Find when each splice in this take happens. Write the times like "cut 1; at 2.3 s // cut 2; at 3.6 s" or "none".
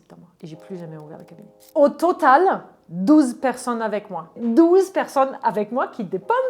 cut 1; at 1.6 s // cut 2; at 4.4 s